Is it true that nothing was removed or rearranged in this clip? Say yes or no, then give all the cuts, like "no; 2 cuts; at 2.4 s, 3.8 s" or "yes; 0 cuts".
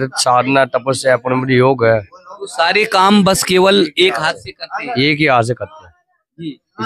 yes; 0 cuts